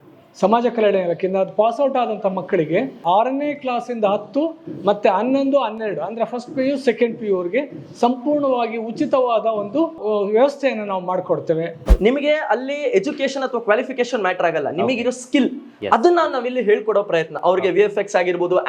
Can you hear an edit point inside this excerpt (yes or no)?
yes